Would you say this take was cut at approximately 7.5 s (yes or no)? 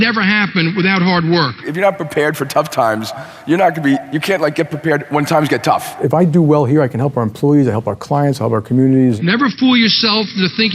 no